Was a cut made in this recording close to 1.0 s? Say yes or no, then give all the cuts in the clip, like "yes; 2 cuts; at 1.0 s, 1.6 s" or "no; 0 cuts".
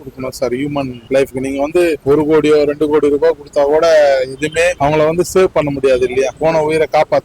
yes; 4 cuts; at 1.0 s, 2.0 s, 4.8 s, 6.3 s